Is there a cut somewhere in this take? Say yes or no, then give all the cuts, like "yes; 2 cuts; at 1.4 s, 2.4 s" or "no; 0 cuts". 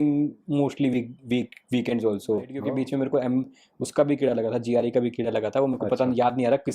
yes; 1 cut; at 2.6 s